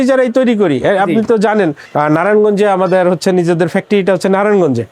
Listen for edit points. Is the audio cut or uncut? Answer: cut